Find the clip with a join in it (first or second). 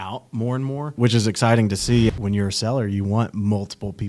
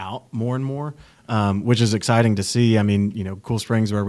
first